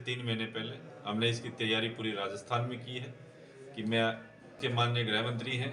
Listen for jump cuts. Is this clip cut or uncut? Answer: cut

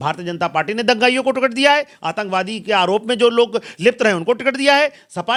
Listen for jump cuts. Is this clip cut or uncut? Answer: uncut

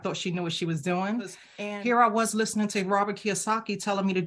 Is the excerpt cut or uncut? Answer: cut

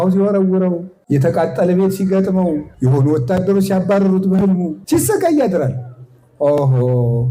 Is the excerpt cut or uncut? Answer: cut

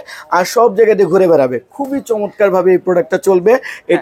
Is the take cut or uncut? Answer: uncut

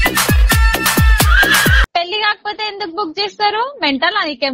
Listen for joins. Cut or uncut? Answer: cut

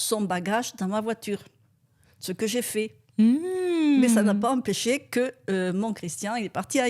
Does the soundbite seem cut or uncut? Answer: uncut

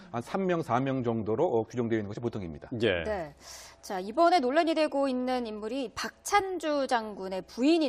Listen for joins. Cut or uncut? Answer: uncut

